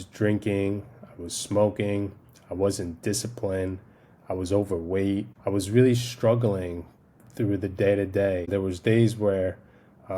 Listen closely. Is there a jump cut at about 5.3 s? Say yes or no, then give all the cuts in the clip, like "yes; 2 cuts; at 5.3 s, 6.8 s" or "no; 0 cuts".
yes; 2 cuts; at 5.3 s, 8.5 s